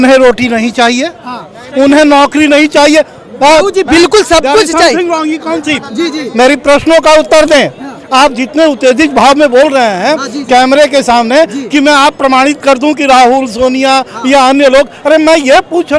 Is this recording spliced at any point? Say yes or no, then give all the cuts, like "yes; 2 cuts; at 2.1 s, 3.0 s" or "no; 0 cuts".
no; 0 cuts